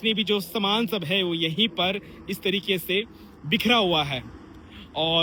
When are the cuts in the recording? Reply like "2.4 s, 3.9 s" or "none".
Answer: none